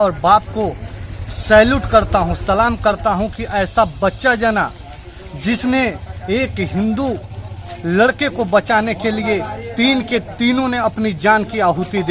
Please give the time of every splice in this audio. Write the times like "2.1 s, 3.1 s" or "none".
none